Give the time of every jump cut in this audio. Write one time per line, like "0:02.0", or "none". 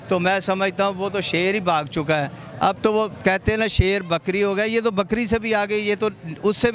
none